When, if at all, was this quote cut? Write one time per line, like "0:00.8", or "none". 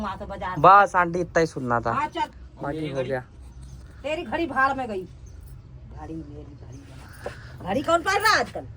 none